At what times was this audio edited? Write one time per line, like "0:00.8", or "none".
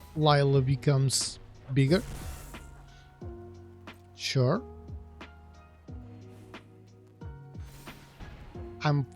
0:02.6
0:04.2
0:05.1
0:08.1